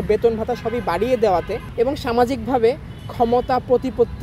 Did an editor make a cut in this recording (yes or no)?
yes